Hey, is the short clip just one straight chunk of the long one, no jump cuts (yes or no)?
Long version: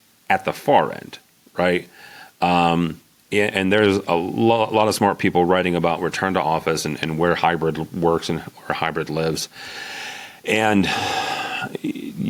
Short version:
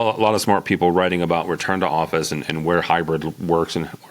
yes